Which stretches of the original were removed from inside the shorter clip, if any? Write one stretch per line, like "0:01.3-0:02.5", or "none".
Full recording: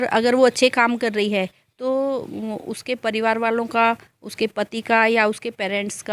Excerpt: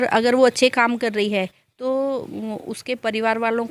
none